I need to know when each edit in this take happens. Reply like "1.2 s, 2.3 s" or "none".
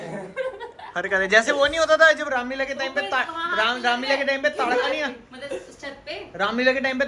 none